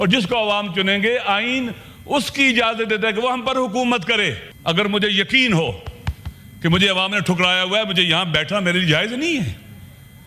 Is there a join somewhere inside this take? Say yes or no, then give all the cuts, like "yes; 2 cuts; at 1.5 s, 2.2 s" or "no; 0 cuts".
yes; 1 cut; at 4.5 s